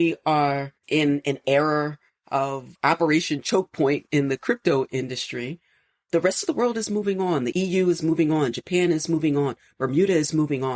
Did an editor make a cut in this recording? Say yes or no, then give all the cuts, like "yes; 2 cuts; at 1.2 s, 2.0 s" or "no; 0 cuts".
yes; 1 cut; at 2.7 s